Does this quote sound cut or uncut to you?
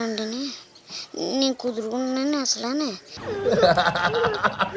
cut